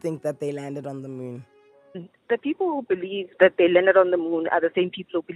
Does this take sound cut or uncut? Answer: cut